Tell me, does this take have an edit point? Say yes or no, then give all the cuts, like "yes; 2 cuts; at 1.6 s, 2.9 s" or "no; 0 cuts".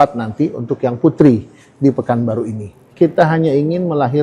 yes; 1 cut; at 2.8 s